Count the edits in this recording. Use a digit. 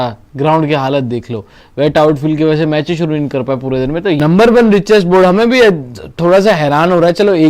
1